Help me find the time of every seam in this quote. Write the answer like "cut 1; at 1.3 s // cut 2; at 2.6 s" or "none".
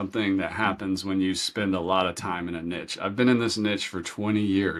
none